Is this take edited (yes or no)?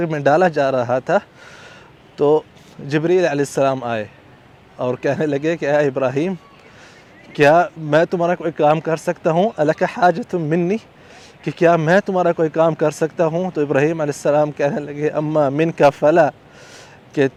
no